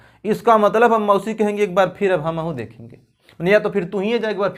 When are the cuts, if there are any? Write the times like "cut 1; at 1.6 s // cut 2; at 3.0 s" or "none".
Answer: none